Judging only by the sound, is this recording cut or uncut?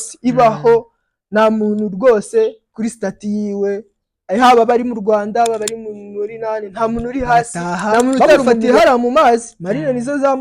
cut